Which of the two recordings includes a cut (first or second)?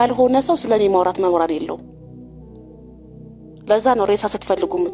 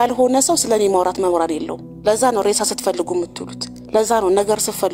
second